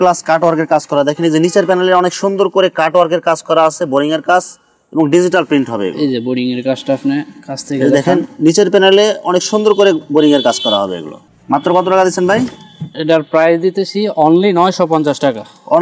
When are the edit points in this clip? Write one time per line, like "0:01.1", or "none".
none